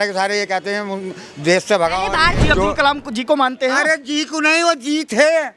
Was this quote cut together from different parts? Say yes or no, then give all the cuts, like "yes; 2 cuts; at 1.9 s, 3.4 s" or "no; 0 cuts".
yes; 1 cut; at 2.4 s